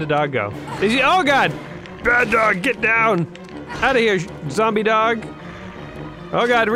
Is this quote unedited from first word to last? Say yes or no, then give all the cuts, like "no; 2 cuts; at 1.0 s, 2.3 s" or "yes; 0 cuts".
yes; 0 cuts